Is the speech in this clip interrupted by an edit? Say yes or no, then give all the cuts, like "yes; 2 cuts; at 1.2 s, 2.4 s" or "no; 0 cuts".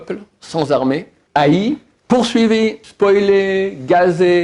yes; 3 cuts; at 1.2 s, 1.9 s, 2.8 s